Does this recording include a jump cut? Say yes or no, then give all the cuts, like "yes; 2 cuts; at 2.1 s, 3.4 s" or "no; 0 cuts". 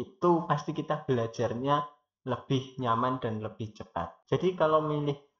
yes; 1 cut; at 4.2 s